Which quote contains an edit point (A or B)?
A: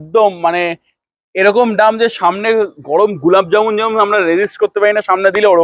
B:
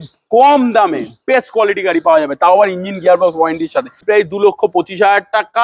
B